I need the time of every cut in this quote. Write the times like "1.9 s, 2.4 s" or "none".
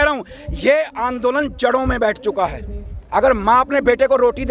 none